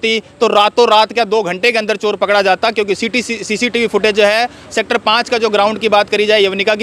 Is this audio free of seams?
yes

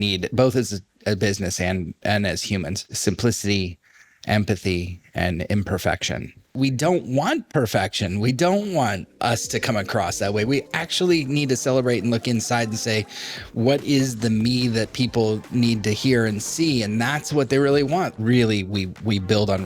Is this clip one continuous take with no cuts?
no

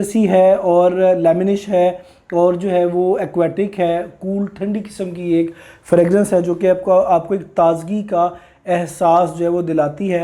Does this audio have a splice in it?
no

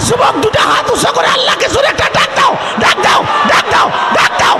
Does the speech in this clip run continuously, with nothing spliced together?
yes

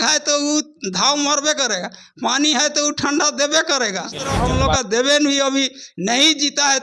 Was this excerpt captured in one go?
no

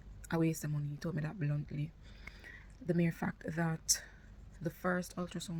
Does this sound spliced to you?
no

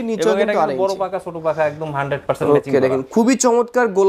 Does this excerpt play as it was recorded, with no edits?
yes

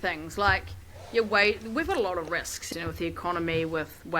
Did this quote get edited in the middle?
yes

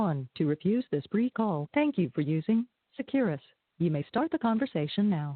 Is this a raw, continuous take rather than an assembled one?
no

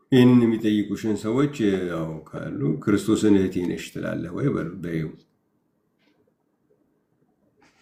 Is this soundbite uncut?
yes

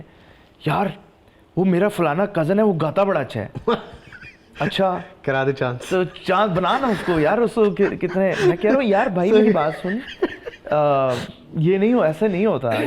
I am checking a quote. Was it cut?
no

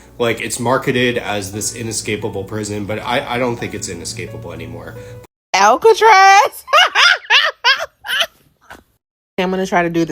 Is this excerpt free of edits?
no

